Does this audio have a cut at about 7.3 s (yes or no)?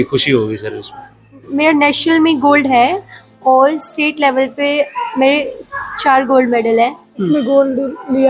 yes